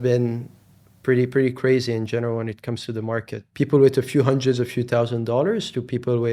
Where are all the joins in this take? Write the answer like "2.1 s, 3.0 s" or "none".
3.4 s